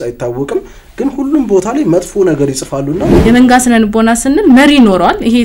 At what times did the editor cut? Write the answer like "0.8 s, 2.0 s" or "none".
3.2 s